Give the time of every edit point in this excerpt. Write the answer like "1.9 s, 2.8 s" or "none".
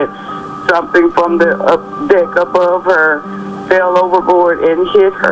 none